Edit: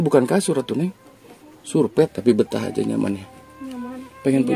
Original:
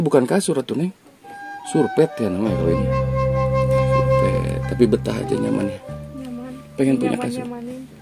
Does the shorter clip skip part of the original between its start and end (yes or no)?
yes